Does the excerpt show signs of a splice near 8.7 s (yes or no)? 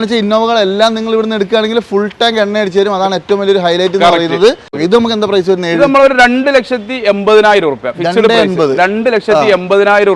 no